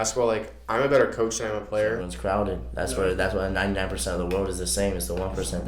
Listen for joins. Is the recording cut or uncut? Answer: cut